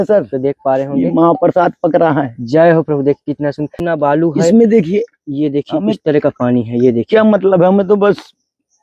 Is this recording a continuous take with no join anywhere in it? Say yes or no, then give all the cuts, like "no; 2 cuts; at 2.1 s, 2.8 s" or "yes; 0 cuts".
no; 1 cut; at 3.7 s